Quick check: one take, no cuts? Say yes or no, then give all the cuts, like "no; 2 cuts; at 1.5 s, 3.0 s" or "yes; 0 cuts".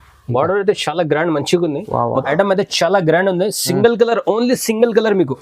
no; 1 cut; at 2.2 s